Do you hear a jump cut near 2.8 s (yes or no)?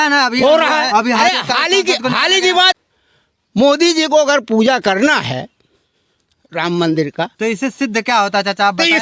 yes